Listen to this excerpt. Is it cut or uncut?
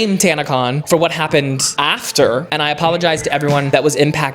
cut